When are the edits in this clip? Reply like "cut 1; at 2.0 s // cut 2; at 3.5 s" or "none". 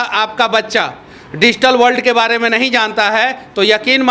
none